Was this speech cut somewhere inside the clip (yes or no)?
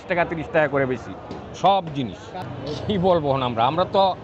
yes